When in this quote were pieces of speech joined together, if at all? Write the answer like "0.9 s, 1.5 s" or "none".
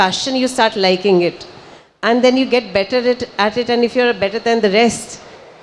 none